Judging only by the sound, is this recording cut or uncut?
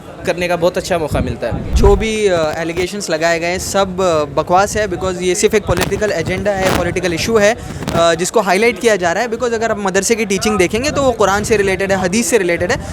cut